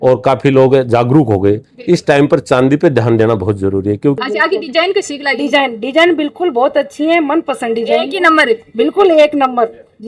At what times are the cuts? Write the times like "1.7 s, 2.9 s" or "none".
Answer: 4.2 s